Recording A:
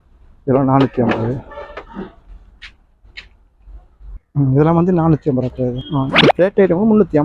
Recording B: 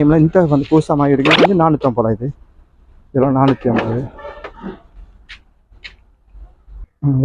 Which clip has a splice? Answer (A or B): A